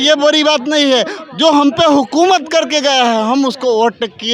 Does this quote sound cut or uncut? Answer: uncut